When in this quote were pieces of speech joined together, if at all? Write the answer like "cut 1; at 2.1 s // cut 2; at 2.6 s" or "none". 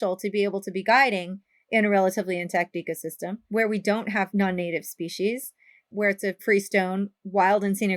cut 1; at 3.4 s